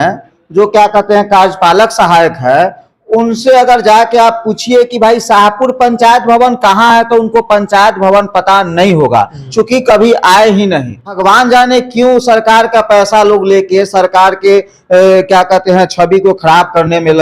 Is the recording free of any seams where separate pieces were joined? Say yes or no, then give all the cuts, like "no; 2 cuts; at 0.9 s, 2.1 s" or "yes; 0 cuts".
no; 1 cut; at 11.2 s